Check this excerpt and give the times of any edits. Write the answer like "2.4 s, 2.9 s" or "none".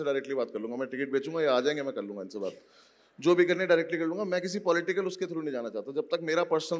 none